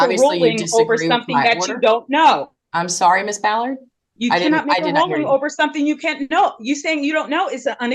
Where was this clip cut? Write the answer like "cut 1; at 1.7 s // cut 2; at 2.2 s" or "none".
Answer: none